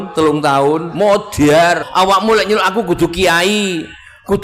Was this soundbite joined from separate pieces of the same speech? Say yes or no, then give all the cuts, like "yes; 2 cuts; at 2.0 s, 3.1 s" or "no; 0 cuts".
yes; 1 cut; at 1.9 s